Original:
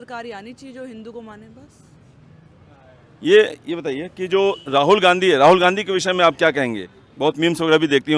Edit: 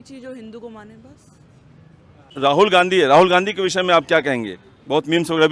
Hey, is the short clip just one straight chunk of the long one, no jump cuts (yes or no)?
no